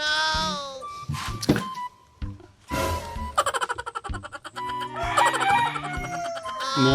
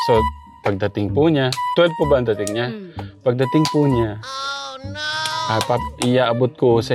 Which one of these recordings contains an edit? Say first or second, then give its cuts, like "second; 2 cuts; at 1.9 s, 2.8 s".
first; 1 cut; at 1.2 s